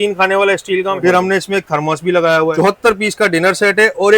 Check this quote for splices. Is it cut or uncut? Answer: cut